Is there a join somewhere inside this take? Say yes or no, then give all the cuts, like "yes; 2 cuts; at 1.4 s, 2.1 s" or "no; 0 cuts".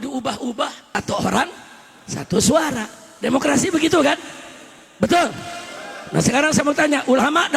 yes; 1 cut; at 1.0 s